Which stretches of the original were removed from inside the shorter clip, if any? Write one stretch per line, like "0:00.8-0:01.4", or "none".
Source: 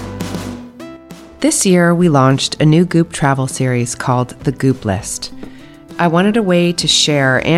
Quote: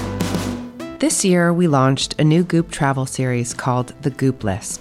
0:00.9-0:01.3